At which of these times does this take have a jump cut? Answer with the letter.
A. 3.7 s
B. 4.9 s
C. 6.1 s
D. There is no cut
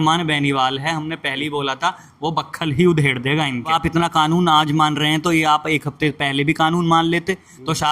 A